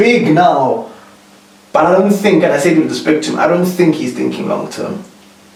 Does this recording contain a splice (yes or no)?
no